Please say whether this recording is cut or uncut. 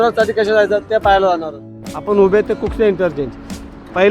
cut